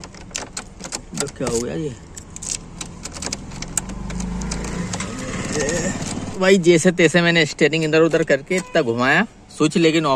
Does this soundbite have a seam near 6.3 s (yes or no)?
yes